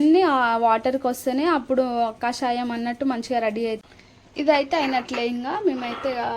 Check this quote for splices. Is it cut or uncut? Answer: cut